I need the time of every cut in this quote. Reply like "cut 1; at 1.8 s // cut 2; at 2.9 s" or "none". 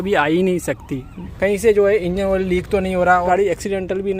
cut 1; at 1.2 s // cut 2; at 3.3 s